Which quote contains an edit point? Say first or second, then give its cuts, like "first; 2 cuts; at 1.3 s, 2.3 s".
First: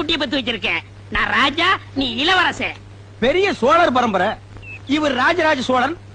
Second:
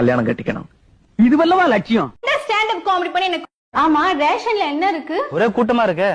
second; 1 cut; at 2.1 s